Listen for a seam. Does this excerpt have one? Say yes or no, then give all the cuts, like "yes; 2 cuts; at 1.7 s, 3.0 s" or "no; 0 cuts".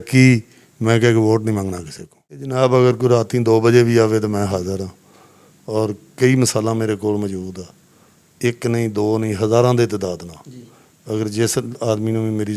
yes; 1 cut; at 2.5 s